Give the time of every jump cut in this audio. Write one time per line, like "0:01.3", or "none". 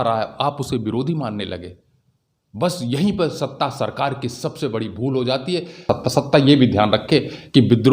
0:05.8